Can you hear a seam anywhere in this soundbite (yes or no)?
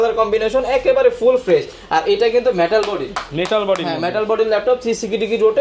no